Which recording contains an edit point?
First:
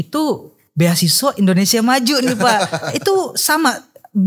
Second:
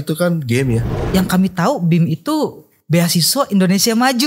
second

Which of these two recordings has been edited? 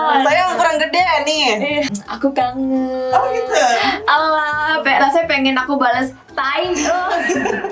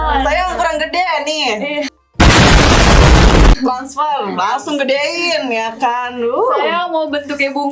first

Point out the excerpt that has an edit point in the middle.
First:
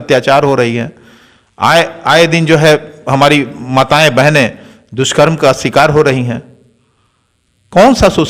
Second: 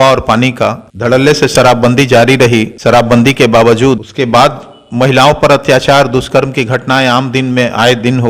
second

